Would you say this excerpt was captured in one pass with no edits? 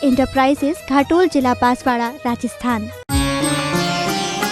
no; 1 cut; at 3.0 s

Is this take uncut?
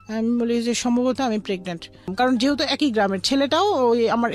no; 1 cut; at 2.1 s

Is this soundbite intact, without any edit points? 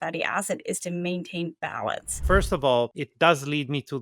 no; 2 cuts; at 2.1 s, 3.0 s

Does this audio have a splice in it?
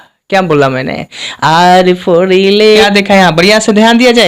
yes; 1 cut; at 2.6 s

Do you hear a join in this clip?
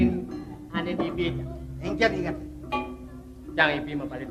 no; 0 cuts

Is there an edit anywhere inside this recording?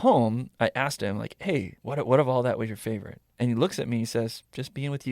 yes; 1 cut; at 1.8 s

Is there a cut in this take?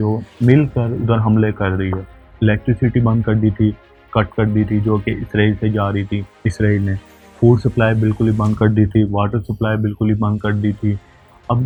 no; 0 cuts

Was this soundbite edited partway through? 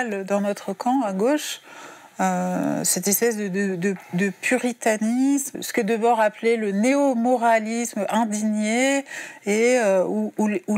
yes; 1 cut; at 5.5 s

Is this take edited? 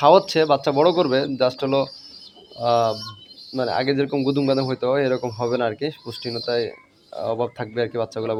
no; 0 cuts

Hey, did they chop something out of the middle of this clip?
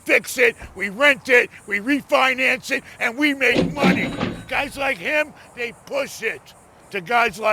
no; 0 cuts

